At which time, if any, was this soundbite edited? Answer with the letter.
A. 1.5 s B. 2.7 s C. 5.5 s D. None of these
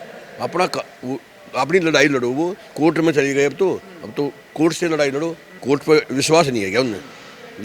C